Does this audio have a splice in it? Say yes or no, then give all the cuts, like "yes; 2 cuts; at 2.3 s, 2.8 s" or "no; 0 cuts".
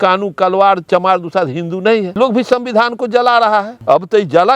yes; 3 cuts; at 0.8 s, 2.1 s, 3.7 s